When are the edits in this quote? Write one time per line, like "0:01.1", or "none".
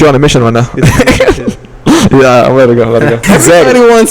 0:03.2

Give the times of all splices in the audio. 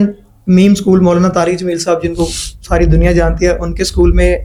none

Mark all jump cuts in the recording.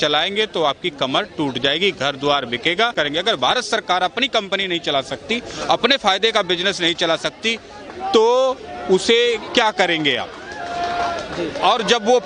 0:02.9

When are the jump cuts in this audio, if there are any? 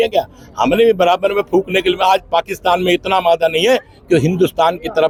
none

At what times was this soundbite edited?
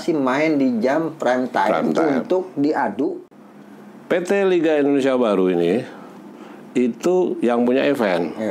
0:03.3

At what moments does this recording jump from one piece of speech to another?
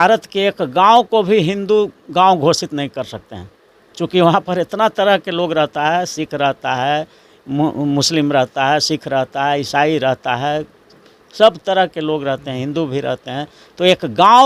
none

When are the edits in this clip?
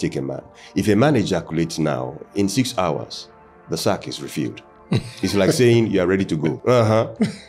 0:06.6

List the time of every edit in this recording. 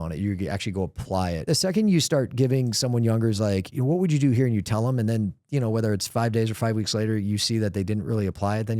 0:01.5

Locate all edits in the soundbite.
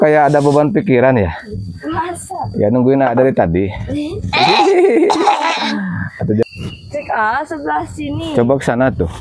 0:06.4

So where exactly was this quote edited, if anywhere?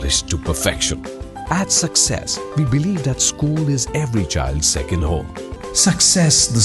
0:05.5

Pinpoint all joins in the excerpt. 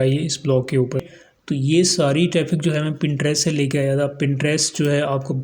0:01.1

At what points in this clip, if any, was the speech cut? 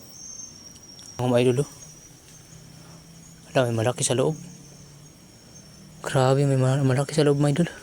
0:01.2

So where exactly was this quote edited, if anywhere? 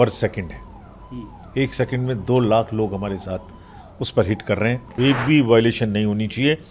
0:05.0

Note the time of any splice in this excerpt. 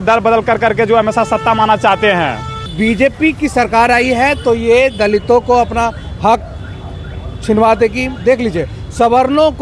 0:02.7

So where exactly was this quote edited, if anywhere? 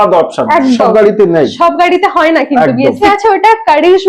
0:03.0

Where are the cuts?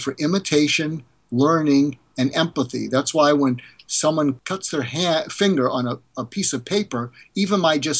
0:04.4

